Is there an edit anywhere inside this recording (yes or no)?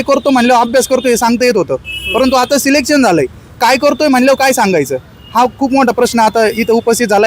no